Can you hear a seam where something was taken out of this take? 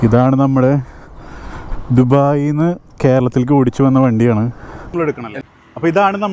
yes; 1 cut; at 4.9 s

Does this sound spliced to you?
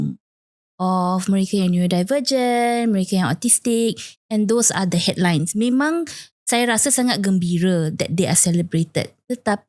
no; 0 cuts

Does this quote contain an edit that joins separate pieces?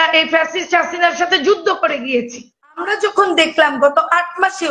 yes; 1 cut; at 2.8 s

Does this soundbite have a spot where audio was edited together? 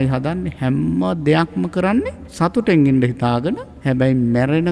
yes; 2 cuts; at 2.2 s, 3.7 s

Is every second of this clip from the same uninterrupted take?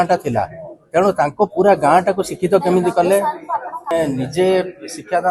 no; 1 cut; at 3.9 s

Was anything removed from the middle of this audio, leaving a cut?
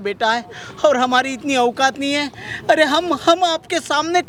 no; 0 cuts

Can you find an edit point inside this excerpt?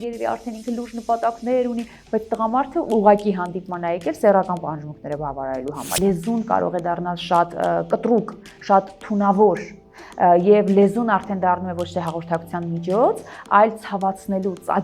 yes; 1 cut; at 6.0 s

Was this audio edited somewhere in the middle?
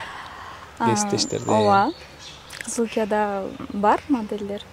no; 0 cuts

